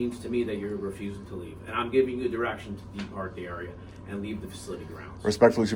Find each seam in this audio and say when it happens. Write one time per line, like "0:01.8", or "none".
none

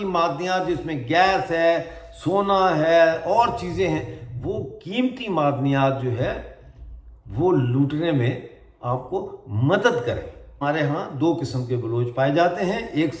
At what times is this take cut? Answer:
0:10.6

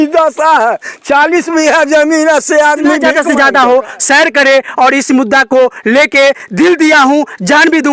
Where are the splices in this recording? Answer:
0:03.1

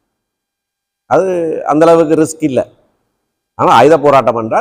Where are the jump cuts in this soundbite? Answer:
none

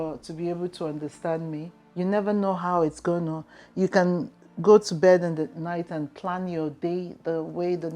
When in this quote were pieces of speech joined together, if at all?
0:01.8

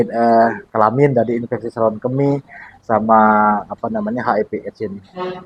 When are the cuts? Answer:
none

